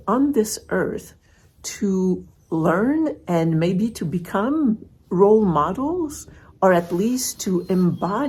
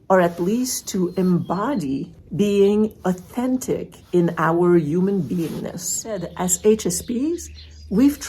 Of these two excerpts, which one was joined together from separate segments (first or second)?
second